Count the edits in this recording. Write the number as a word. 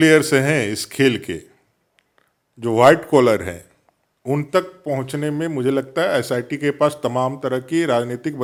zero